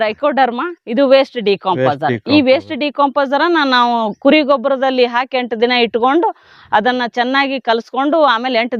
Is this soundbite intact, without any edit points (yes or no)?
yes